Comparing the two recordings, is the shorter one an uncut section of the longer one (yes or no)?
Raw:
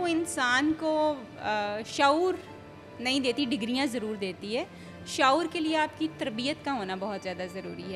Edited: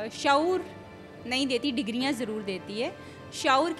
yes